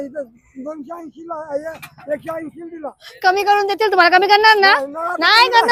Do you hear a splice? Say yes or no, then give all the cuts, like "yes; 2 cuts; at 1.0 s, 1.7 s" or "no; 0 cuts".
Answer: no; 0 cuts